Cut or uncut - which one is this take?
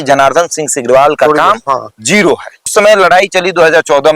cut